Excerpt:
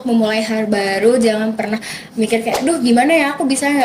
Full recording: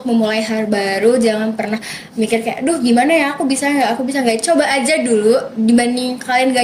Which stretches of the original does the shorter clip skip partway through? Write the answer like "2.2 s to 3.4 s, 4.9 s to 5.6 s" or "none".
none